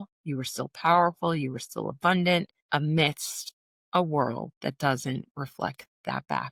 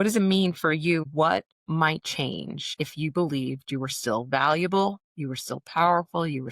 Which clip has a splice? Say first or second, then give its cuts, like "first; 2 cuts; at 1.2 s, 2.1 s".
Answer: second; 1 cut; at 1.0 s